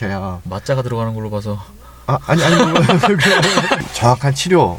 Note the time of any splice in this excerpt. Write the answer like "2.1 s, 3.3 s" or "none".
3.8 s

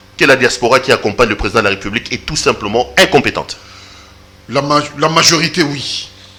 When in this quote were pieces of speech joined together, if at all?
none

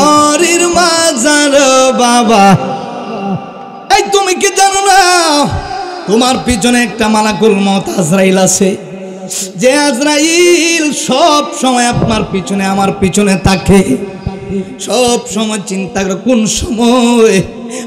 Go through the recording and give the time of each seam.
3.7 s

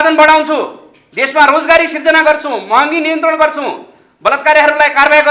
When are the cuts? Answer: none

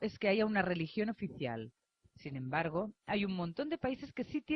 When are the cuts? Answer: 2.7 s

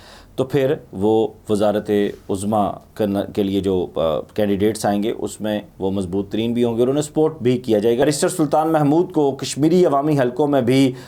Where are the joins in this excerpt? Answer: 8.0 s

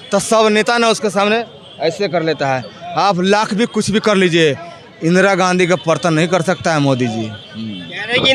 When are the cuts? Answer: none

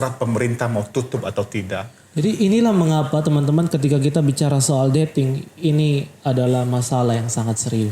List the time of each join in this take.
2.0 s

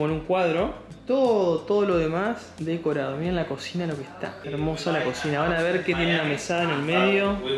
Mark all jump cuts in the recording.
none

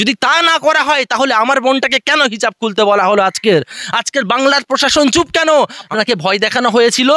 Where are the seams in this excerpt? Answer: 5.8 s

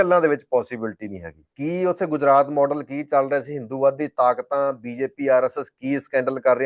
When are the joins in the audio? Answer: 1.5 s

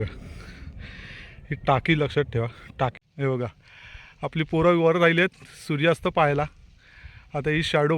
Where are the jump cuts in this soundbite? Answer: 3.0 s

